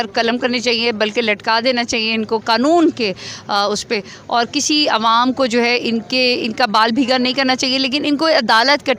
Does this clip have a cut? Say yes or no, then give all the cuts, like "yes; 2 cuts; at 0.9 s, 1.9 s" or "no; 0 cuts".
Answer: no; 0 cuts